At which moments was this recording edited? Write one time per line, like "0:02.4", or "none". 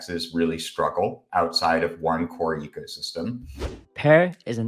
0:03.5